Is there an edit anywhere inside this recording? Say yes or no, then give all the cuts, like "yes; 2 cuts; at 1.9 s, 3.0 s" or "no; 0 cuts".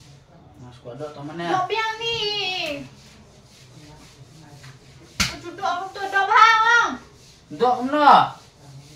yes; 2 cuts; at 3.4 s, 7.1 s